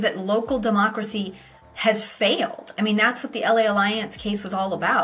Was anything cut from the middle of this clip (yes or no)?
no